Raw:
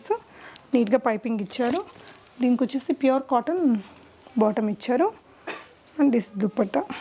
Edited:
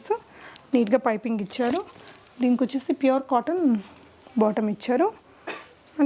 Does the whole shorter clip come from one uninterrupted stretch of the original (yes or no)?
yes